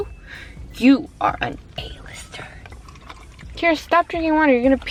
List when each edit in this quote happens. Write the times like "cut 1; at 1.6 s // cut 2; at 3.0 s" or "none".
none